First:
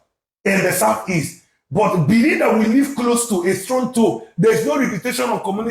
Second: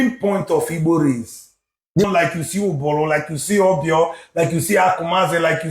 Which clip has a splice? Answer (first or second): second